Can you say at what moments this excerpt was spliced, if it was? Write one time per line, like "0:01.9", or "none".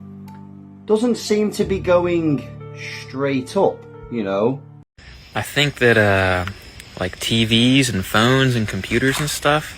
0:04.7